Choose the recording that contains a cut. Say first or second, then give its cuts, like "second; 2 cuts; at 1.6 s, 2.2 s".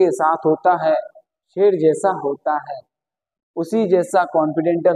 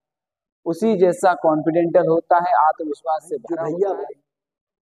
second; 1 cut; at 3.4 s